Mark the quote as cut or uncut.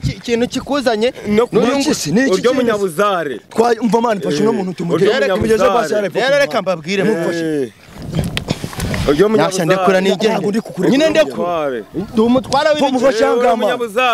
uncut